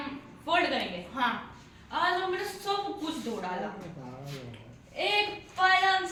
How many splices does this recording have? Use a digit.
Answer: 0